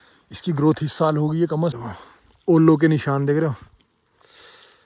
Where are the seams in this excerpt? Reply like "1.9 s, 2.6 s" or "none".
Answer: 1.7 s